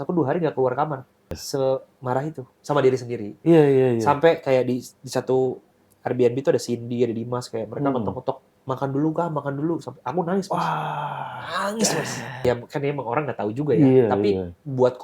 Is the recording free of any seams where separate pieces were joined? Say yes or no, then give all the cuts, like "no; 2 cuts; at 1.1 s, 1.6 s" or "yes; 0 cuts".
no; 2 cuts; at 1.4 s, 12.4 s